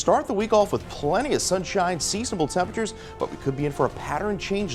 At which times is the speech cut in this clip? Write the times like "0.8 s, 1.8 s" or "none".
none

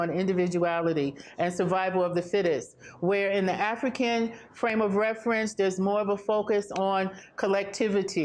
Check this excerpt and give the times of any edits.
none

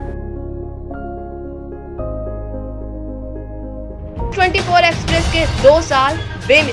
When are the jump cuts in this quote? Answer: 4.3 s

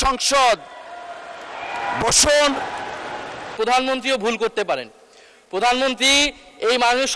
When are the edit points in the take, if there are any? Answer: 3.5 s

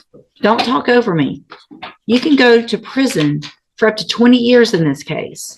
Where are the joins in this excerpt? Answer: none

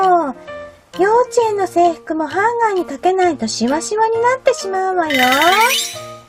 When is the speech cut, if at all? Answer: none

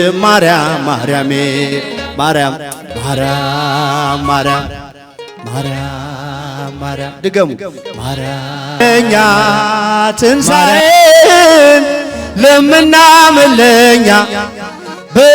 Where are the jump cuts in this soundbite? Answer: 8.8 s

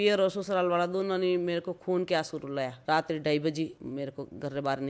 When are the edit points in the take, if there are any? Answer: 2.8 s, 3.8 s

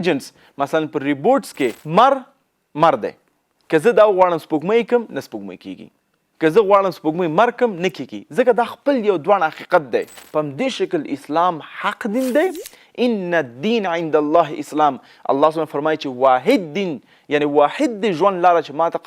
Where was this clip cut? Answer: 1.8 s, 10.2 s

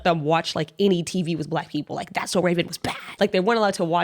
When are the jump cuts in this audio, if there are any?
3.1 s

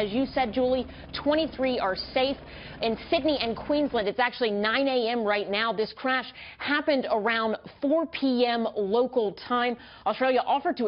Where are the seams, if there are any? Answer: 7.9 s

